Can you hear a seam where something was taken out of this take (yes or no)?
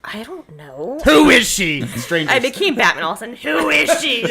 yes